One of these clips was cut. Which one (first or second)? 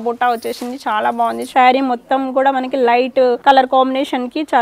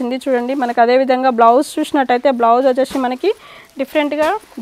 first